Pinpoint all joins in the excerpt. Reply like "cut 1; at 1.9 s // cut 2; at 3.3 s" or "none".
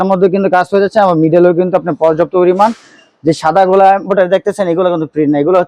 none